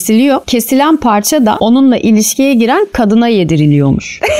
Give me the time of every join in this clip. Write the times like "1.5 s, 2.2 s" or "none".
none